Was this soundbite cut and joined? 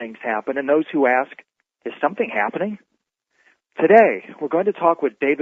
yes; 1 cut; at 1.7 s

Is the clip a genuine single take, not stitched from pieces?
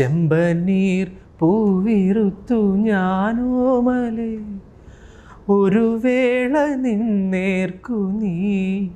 yes; 0 cuts

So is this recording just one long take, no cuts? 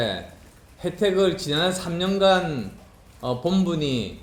yes; 0 cuts

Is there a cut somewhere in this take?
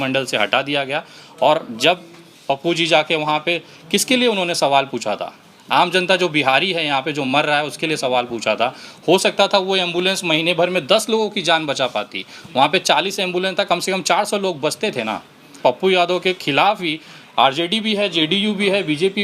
yes; 1 cut; at 15.6 s

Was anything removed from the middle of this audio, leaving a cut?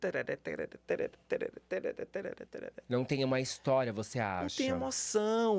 no; 0 cuts

